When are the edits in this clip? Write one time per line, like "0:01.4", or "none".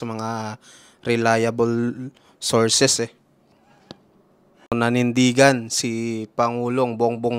0:04.7